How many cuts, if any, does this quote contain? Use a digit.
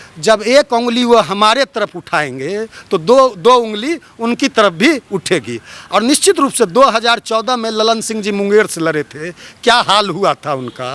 0